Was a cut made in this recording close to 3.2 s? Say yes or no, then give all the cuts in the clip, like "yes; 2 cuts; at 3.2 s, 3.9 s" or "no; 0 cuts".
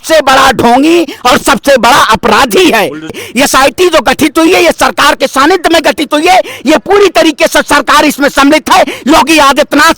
yes; 1 cut; at 3.2 s